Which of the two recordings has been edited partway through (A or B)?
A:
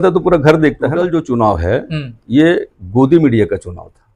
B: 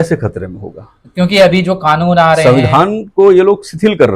A